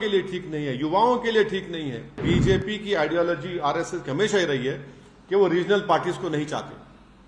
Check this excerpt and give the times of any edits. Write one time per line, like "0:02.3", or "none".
0:02.2